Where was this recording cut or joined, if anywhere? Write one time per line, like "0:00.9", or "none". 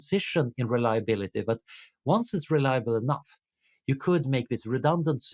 none